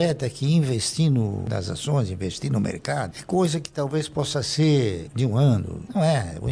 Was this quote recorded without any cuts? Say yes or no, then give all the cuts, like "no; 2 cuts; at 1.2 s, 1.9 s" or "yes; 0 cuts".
yes; 0 cuts